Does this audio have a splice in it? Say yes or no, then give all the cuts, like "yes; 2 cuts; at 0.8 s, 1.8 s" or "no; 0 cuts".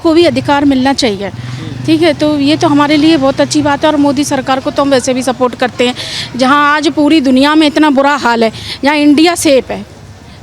no; 0 cuts